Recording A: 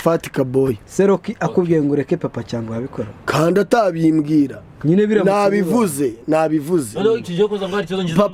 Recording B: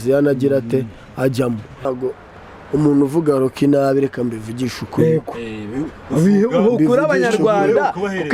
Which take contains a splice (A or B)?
B